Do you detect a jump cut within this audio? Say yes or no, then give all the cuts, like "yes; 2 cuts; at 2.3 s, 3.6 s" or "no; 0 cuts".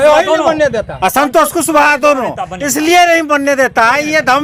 no; 0 cuts